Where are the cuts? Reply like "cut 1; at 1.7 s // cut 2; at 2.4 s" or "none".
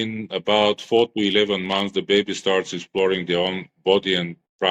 none